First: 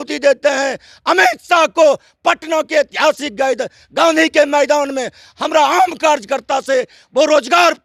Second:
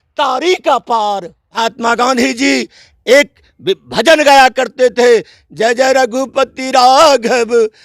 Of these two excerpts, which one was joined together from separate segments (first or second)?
second